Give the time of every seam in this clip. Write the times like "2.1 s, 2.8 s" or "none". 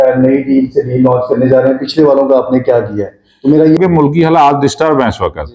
3.7 s